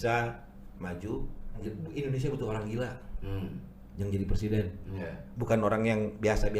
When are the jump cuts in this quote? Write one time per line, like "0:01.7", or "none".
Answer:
0:01.6